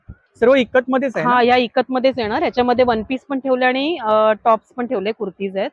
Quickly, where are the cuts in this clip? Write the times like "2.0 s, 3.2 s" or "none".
none